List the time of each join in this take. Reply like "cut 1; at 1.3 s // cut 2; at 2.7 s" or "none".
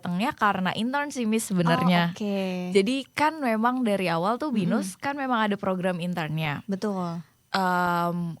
none